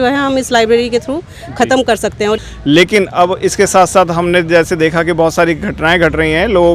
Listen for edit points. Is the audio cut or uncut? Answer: cut